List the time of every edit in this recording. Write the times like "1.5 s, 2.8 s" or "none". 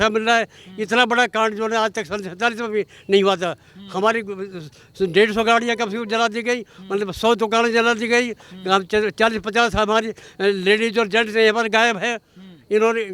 none